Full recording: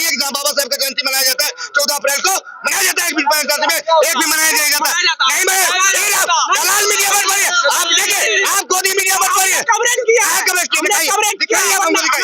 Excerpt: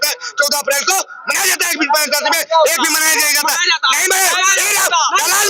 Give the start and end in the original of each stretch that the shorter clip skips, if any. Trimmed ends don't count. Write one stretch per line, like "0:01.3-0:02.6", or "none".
none